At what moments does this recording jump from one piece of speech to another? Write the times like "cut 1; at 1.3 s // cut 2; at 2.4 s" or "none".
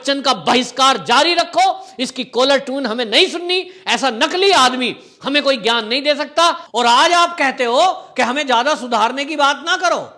cut 1; at 6.6 s